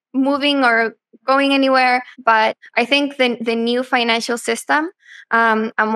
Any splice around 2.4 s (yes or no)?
yes